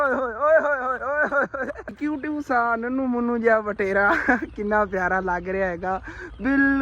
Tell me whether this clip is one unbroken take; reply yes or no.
no